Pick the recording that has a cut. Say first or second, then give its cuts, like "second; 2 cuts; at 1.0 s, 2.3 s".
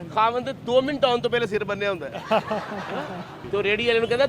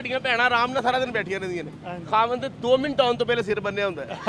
first; 1 cut; at 3.4 s